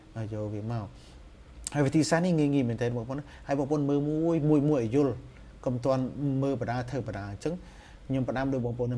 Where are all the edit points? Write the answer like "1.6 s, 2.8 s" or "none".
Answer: none